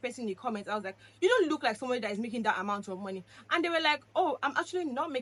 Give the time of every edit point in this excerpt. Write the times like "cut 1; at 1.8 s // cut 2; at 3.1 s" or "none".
none